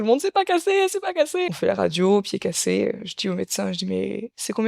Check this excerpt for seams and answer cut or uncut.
cut